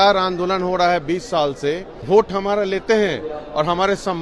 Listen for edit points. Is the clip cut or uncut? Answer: cut